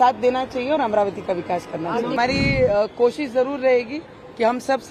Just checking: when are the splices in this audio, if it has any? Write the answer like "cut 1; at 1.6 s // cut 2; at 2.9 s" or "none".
cut 1; at 2.2 s